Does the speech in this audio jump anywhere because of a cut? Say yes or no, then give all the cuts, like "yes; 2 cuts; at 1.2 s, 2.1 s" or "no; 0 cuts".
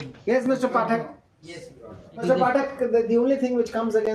yes; 1 cut; at 2.2 s